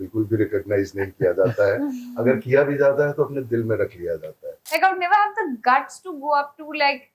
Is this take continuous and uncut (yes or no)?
no